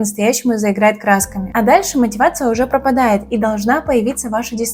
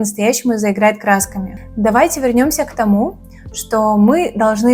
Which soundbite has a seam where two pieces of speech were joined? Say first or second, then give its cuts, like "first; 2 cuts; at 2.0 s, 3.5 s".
first; 1 cut; at 1.4 s